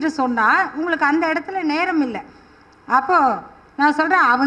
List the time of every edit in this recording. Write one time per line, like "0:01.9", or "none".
none

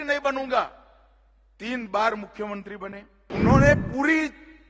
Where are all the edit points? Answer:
0:03.1

